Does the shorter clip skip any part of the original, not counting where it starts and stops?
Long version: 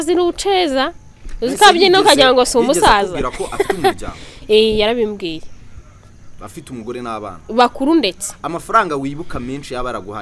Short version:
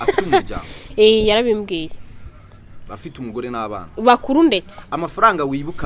no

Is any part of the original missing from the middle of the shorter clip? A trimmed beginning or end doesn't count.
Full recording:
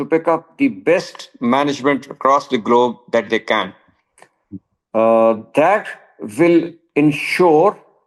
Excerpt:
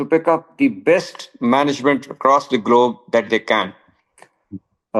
no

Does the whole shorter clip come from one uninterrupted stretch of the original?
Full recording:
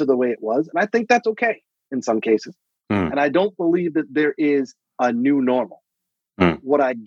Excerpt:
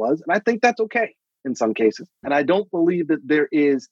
no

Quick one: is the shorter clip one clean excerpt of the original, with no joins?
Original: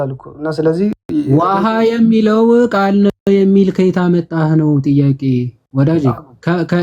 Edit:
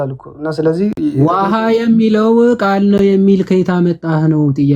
no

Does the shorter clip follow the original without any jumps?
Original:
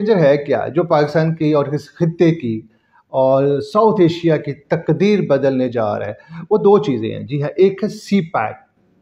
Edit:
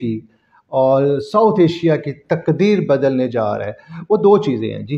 yes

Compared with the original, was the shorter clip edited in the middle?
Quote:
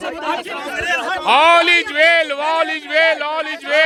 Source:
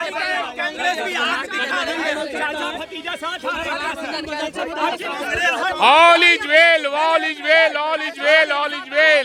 no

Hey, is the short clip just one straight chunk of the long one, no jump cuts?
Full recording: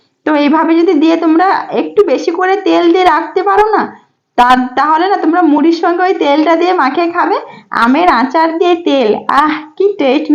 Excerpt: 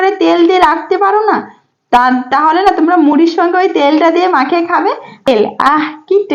no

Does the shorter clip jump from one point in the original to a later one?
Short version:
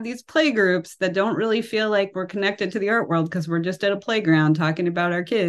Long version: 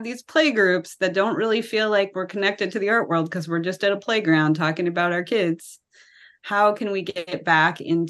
no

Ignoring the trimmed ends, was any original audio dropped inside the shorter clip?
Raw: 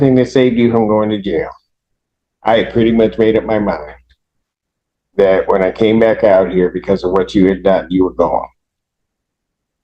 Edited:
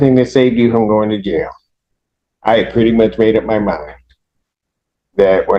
no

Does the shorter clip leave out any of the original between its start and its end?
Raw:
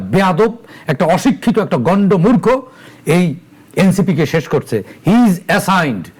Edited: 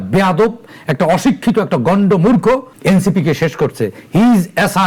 yes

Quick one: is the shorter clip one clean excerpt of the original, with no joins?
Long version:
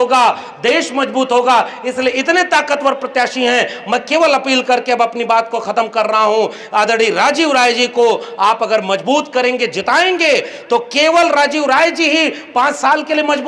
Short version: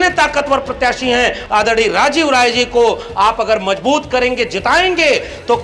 no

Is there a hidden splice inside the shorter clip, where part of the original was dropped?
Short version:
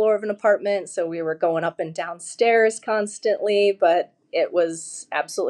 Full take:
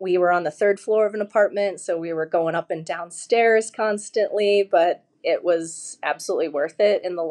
no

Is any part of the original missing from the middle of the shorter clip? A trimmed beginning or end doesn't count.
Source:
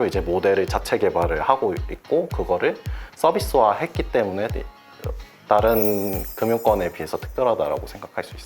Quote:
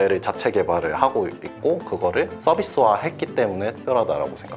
yes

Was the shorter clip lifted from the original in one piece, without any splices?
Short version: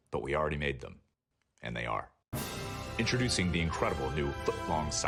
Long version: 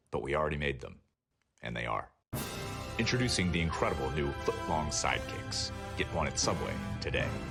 yes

